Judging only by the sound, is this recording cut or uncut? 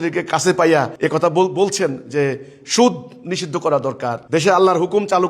cut